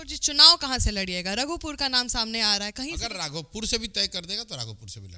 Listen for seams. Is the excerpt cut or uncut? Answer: cut